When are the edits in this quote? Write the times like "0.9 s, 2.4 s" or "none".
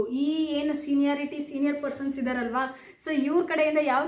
none

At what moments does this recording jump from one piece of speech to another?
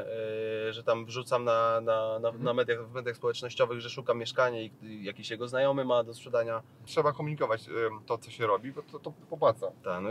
6.8 s

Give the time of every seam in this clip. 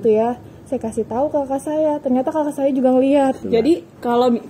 3.4 s

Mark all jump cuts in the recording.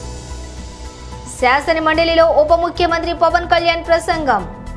1.0 s

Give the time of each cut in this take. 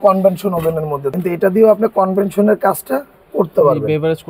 1.1 s

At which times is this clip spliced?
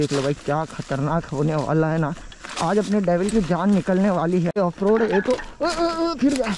4.6 s

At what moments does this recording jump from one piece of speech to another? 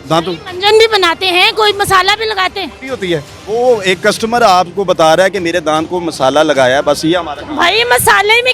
3.2 s

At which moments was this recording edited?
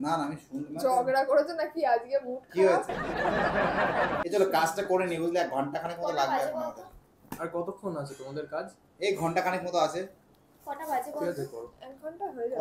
none

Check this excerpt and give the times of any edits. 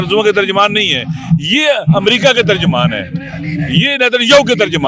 none

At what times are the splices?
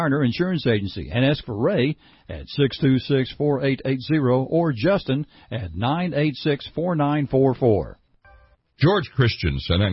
8.1 s

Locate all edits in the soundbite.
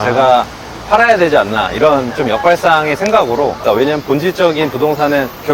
3.6 s

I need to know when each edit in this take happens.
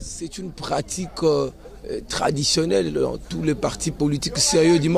none

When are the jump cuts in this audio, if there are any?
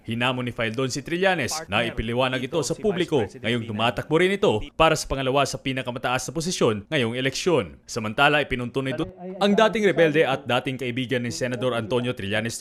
none

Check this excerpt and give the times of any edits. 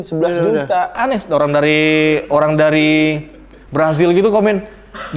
1.0 s

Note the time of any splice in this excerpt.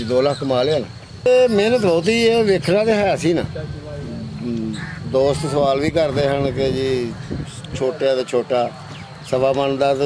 1.3 s

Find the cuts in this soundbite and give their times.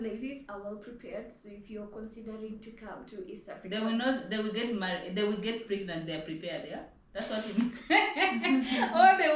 none

